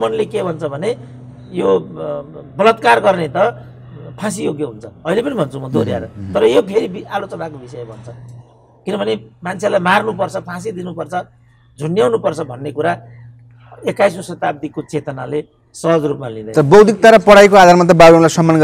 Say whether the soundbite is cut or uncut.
uncut